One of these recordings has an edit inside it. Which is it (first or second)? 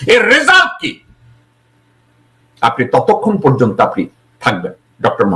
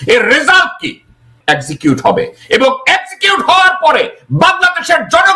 second